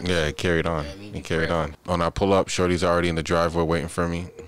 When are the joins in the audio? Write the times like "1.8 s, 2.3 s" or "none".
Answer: 1.8 s